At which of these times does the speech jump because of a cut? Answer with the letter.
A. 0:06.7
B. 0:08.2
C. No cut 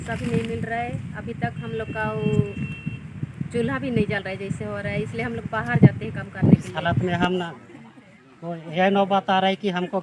A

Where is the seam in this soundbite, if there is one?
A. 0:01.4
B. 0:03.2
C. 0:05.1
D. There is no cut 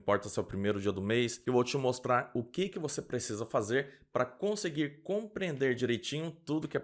A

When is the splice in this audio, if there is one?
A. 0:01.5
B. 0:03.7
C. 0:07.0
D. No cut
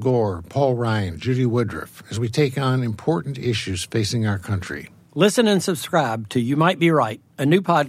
D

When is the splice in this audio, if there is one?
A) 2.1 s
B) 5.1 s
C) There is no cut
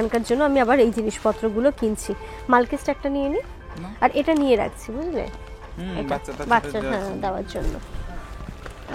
C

